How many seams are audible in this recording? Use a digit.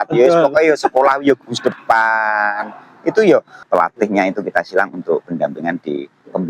1